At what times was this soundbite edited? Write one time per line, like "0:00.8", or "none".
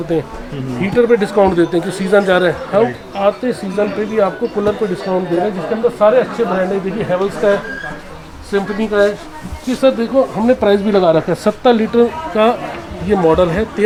none